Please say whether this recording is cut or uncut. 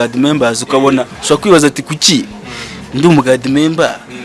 uncut